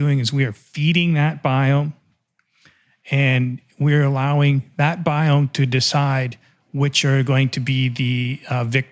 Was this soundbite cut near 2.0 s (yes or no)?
no